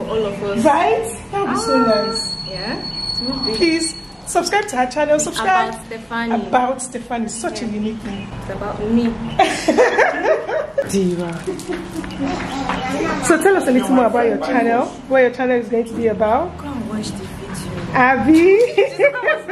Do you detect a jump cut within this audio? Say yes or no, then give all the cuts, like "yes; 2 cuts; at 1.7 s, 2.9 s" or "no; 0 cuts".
no; 0 cuts